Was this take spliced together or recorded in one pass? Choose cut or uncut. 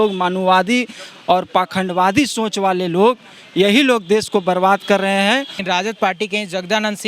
cut